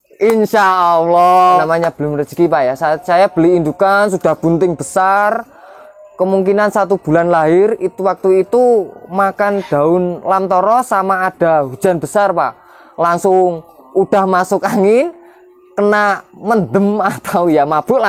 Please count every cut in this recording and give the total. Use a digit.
1